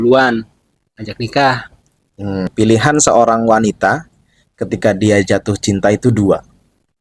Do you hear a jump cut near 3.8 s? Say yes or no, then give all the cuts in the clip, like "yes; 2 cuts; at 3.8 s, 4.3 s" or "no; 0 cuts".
no; 1 cut; at 2.5 s